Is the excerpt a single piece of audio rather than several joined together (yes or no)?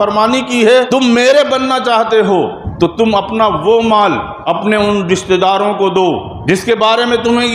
no